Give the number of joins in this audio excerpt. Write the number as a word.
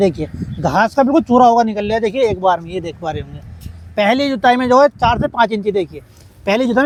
zero